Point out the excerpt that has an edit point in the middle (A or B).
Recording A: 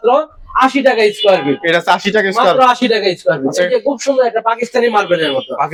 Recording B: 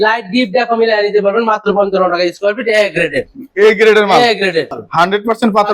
B